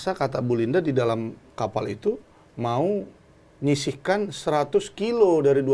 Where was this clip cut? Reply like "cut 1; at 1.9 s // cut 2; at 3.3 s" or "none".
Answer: none